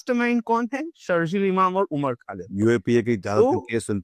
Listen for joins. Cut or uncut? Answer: uncut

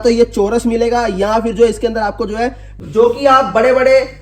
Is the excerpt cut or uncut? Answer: cut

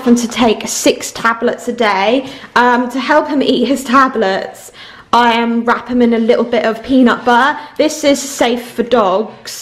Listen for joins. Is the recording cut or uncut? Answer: uncut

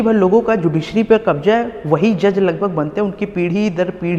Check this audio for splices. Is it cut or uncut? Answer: uncut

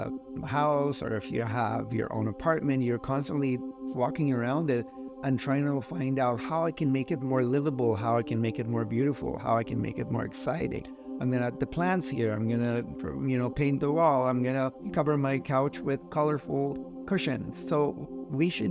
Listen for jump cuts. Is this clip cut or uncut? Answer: cut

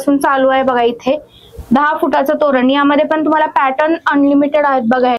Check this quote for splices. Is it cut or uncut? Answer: uncut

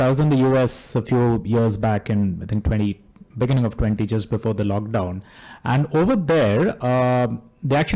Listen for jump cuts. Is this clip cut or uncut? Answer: uncut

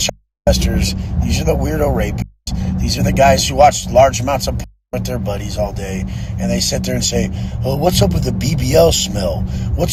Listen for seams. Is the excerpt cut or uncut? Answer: uncut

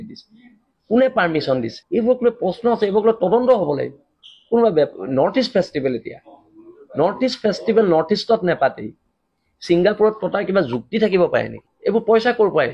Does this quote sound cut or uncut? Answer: uncut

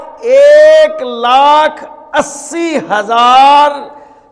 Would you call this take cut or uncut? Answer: uncut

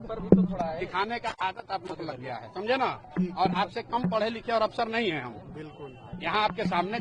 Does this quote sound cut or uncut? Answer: uncut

